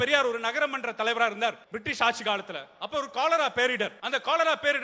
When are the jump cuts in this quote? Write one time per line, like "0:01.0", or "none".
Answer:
0:01.7
0:04.0